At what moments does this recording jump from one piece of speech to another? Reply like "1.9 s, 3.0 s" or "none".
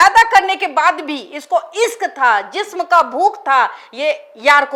none